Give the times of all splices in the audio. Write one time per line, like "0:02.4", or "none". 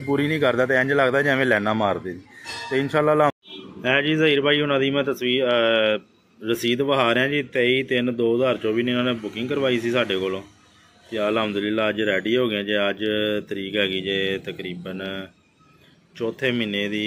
0:03.3